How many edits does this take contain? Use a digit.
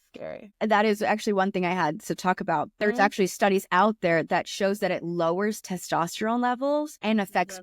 1